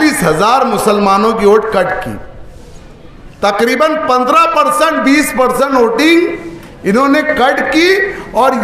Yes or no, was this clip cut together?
no